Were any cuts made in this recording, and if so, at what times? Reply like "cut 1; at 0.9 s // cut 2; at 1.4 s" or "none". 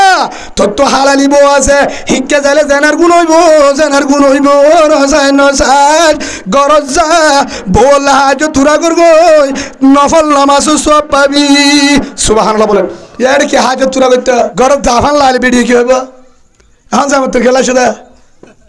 cut 1; at 13.0 s // cut 2; at 14.5 s